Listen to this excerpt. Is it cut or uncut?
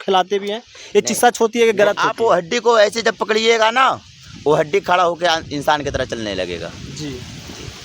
cut